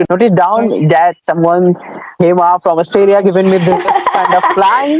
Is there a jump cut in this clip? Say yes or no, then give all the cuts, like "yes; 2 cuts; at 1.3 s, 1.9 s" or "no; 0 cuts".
no; 0 cuts